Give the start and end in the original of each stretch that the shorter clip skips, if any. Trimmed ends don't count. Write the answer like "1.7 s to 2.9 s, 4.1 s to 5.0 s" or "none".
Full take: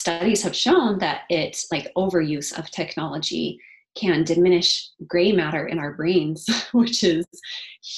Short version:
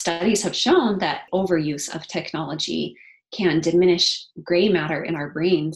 1.2 s to 1.9 s